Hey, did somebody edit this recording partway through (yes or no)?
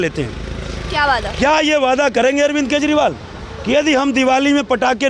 no